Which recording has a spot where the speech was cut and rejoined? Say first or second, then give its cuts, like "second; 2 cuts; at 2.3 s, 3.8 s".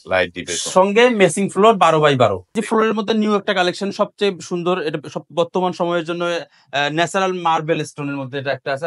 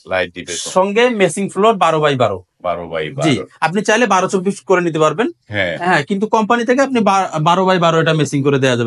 first; 1 cut; at 2.6 s